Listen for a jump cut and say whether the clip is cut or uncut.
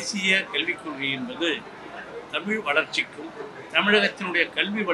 uncut